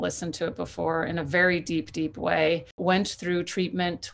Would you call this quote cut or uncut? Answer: cut